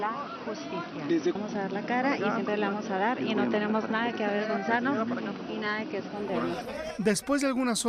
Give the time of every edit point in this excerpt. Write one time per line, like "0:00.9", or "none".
0:03.0